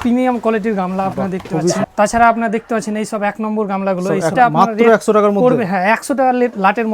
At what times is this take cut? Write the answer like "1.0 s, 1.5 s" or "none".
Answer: 1.8 s, 4.3 s